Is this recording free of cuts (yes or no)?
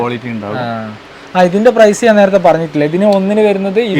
yes